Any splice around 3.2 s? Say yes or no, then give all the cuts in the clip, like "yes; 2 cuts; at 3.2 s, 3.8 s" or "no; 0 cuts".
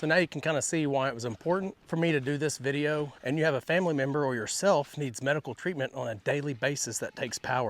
yes; 2 cuts; at 1.8 s, 3.2 s